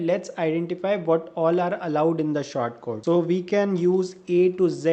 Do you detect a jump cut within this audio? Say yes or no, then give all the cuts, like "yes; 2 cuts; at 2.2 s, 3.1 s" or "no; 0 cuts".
no; 0 cuts